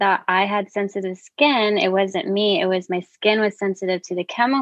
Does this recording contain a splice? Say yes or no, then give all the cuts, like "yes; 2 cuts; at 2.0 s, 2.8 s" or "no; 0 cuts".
no; 0 cuts